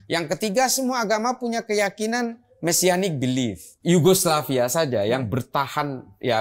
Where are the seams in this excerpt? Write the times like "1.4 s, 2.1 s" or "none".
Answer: 3.7 s